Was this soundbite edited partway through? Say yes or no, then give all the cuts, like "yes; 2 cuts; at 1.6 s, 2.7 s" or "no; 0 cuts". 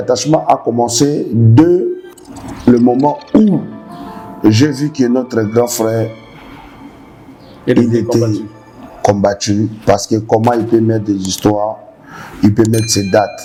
no; 0 cuts